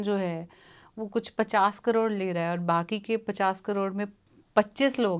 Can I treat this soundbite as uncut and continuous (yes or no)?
yes